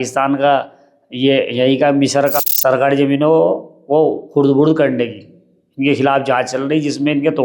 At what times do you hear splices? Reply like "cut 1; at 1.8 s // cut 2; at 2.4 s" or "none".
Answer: cut 1; at 2.5 s